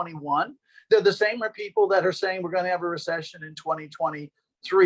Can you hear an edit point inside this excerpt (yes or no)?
no